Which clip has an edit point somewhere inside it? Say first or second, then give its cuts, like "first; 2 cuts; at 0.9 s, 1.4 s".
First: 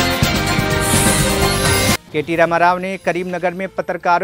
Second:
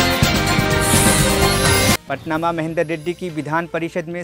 first; 1 cut; at 2.0 s